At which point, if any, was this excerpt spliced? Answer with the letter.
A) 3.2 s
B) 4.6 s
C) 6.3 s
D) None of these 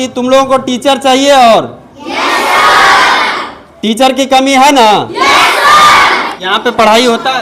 C